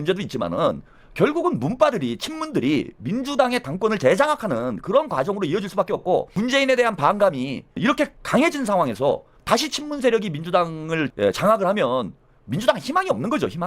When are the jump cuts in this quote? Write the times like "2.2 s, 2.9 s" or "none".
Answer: 6.4 s, 9.3 s, 11.1 s